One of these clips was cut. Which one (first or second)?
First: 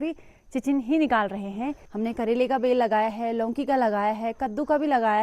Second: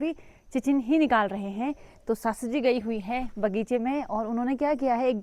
first